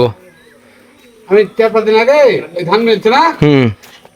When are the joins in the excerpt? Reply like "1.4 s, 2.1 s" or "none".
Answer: none

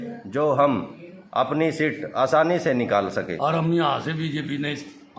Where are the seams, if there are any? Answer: 3.3 s

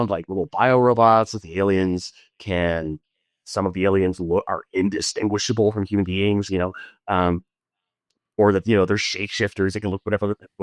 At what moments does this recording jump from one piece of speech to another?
none

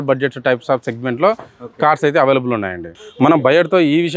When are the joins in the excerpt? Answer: 3.0 s

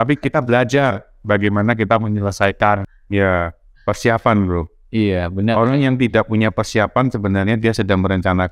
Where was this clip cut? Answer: 3.0 s

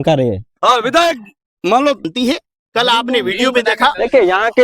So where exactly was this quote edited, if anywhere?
2.0 s

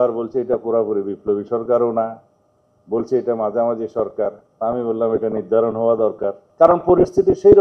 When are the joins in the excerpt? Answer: 6.4 s

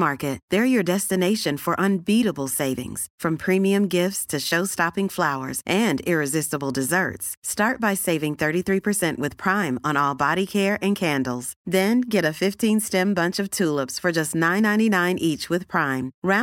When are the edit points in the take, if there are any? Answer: none

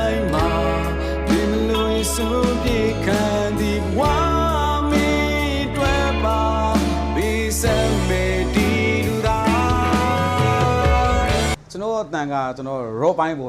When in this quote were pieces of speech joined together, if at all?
11.7 s

